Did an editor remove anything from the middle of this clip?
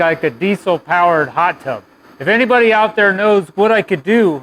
no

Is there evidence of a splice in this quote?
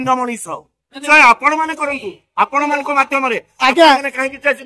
yes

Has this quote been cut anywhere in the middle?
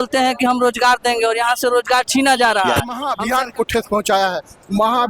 yes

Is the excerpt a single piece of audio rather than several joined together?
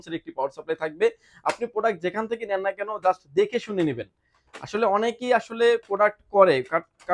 yes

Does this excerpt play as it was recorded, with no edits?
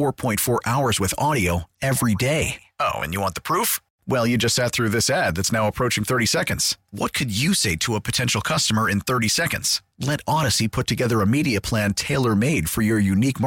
yes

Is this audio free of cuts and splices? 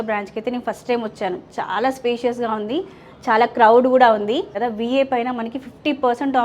no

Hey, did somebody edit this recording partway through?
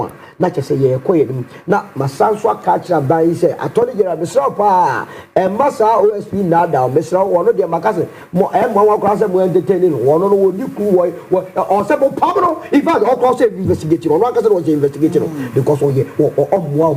no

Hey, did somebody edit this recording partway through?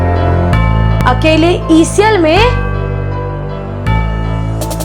yes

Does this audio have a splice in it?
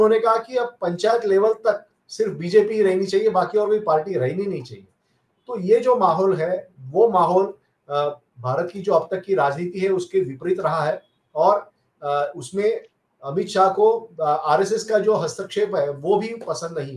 no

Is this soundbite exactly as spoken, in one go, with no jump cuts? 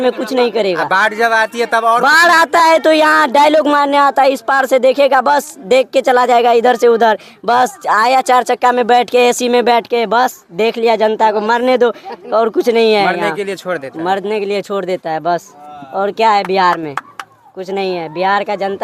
yes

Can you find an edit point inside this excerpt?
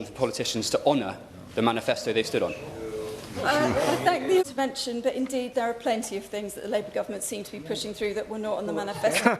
yes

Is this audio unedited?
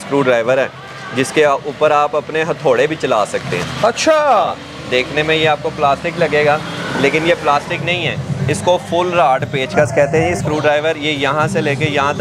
yes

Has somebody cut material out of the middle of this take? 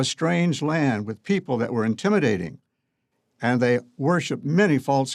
no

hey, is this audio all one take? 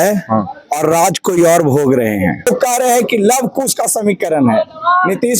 no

